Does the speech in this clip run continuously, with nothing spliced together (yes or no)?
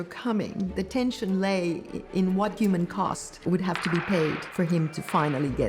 no